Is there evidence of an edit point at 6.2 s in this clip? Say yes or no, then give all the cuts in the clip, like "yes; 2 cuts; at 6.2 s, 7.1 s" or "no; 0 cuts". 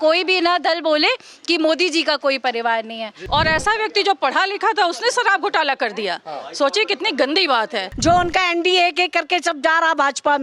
no; 2 cuts; at 3.1 s, 7.9 s